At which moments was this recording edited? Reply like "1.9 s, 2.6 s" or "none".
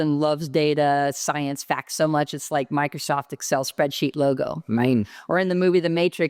none